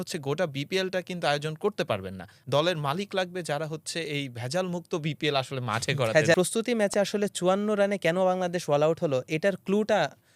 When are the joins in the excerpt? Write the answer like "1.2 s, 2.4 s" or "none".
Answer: 2.3 s, 6.3 s